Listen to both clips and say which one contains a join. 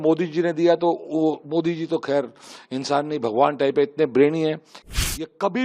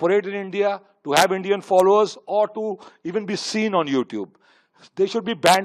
first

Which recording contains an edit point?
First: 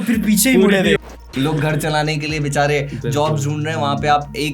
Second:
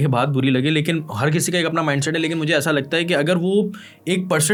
first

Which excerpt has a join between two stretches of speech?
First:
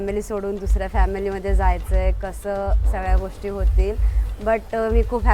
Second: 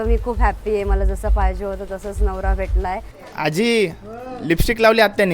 second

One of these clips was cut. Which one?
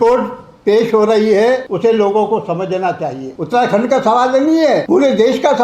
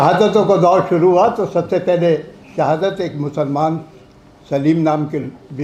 first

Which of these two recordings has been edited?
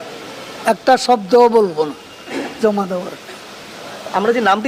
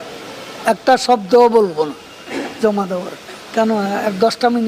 second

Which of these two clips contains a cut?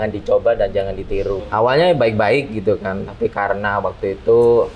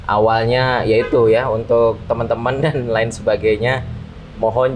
first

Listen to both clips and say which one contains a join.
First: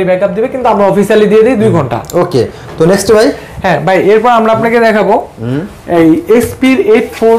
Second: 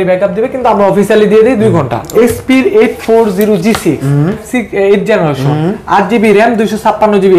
second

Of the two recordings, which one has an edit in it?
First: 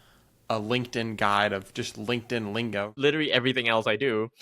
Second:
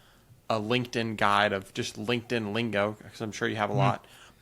first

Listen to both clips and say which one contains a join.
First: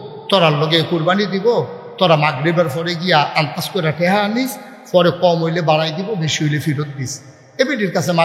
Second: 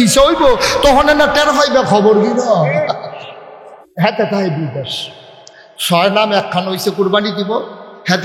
second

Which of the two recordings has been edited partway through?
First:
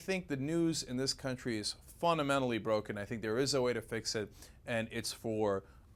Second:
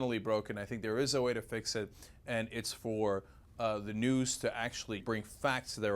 second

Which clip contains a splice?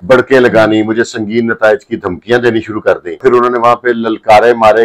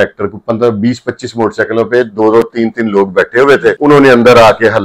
first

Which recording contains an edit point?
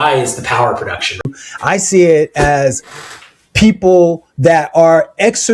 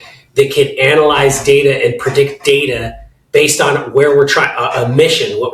first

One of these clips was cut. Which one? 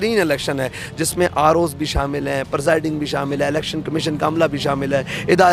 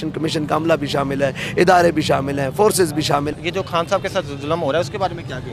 second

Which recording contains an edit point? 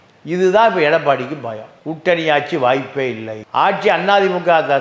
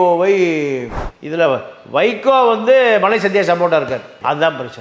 second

